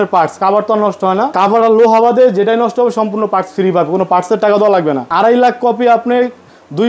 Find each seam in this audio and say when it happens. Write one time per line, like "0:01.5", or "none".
0:01.3
0:05.1